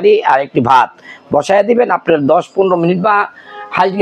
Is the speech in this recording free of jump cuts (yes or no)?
yes